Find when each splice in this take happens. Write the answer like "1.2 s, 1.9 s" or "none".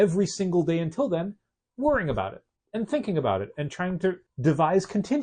4.3 s